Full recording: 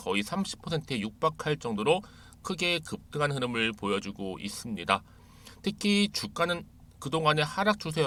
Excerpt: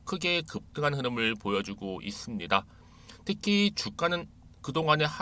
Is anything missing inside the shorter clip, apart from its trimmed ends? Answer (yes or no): no